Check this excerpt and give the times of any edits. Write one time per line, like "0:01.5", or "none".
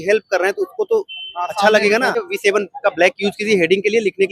0:02.2